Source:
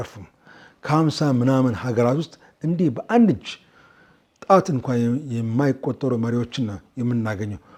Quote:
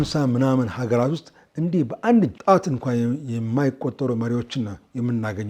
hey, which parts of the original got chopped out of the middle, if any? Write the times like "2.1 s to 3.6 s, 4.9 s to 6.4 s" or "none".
3.4 s to 4.4 s